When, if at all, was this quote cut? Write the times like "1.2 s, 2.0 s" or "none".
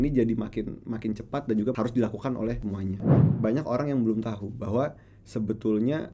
3.1 s